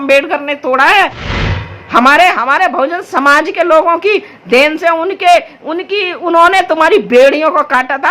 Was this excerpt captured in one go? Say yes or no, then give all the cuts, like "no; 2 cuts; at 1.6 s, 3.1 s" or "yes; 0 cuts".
no; 1 cut; at 1.4 s